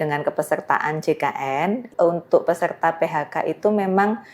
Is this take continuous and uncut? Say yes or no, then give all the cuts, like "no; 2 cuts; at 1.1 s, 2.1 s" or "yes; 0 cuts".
no; 1 cut; at 1.9 s